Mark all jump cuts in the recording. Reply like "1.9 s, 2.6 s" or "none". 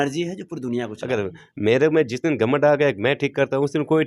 1.0 s